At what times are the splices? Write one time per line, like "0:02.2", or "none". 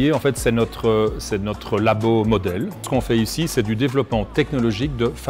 0:02.9